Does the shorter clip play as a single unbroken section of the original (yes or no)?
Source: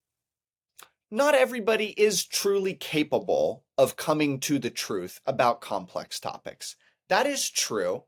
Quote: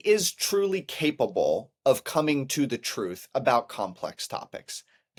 yes